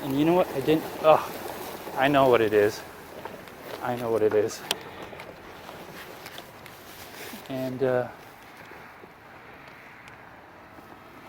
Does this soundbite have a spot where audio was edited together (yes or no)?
no